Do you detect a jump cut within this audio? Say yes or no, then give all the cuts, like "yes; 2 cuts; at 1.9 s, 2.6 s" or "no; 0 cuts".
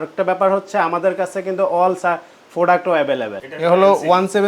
yes; 1 cut; at 3.4 s